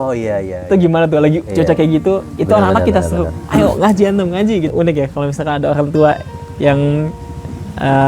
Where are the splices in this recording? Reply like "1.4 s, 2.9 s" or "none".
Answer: 4.7 s